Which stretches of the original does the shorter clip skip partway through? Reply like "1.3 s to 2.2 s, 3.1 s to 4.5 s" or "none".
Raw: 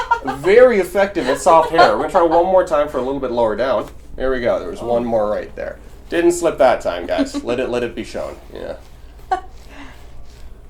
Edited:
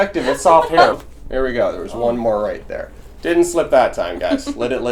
2.0 s to 3.8 s